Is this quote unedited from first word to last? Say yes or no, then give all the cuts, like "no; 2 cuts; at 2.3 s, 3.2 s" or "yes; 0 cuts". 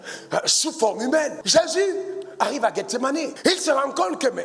no; 2 cuts; at 1.4 s, 3.3 s